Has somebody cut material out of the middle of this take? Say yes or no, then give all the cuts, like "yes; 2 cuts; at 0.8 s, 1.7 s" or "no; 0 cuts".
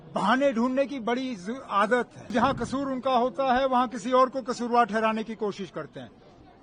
yes; 1 cut; at 2.3 s